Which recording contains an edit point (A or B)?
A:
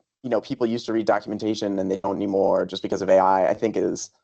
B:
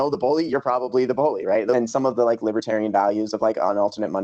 B